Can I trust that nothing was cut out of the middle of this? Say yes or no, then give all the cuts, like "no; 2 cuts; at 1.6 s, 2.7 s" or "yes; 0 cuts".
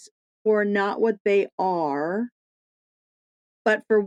yes; 0 cuts